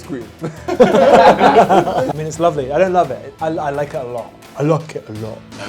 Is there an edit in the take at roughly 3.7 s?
no; 1 cut; at 2.1 s

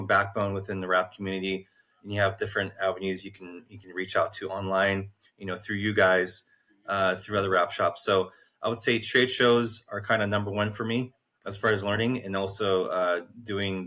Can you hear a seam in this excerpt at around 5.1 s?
no; 0 cuts

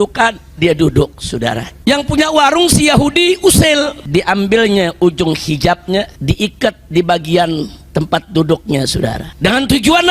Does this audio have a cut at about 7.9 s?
no; 4 cuts; at 1.7 s, 4.0 s, 6.1 s, 9.3 s

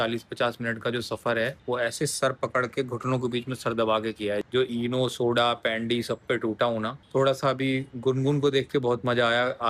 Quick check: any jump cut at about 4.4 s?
yes; 2 cuts; at 4.4 s, 7.0 s

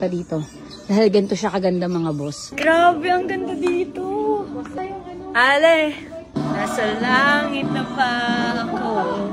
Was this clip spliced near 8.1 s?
no; 2 cuts; at 2.4 s, 4.8 s

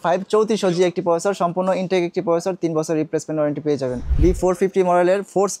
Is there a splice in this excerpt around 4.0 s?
yes; 1 cut; at 4.0 s

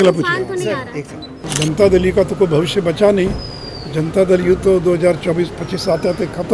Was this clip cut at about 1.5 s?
yes; 1 cut; at 1.5 s

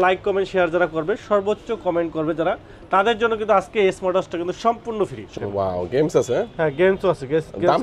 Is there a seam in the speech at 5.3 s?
yes; 1 cut; at 5.3 s

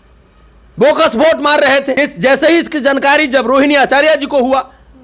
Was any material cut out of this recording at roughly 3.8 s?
no; 1 cut; at 2.0 s

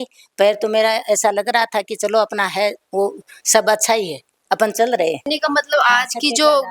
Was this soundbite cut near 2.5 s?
no; 1 cut; at 5.3 s

